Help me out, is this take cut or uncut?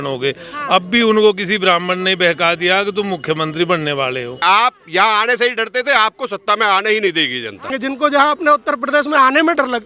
cut